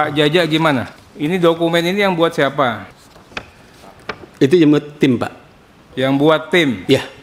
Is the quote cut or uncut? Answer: cut